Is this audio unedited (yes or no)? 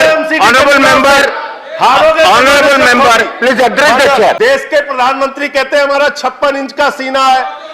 no